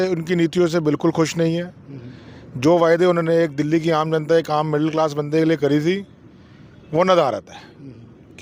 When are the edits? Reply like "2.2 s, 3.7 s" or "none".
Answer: none